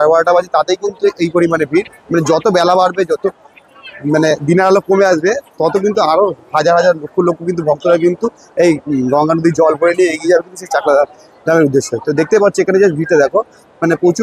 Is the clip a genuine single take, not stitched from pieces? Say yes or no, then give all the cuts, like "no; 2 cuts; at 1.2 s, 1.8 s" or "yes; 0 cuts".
yes; 0 cuts